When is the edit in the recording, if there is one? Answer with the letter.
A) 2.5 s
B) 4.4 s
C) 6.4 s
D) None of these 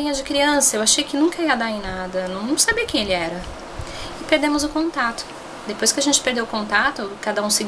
C